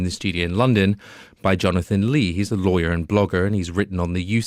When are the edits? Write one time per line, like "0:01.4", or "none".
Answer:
none